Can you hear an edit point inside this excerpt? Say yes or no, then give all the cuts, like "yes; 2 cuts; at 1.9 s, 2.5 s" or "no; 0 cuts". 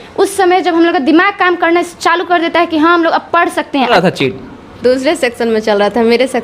yes; 1 cut; at 3.9 s